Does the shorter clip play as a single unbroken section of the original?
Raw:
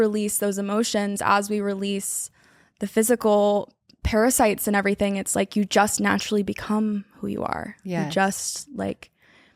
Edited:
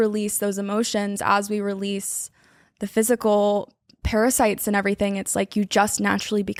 yes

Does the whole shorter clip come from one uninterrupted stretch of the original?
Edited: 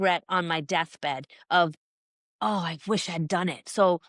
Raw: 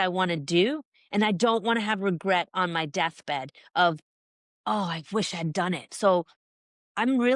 yes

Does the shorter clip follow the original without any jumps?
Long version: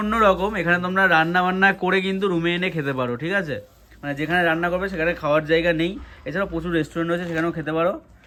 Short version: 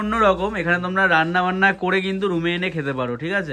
yes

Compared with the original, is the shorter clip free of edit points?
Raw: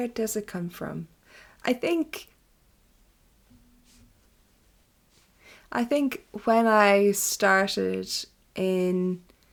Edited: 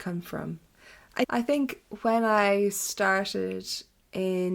no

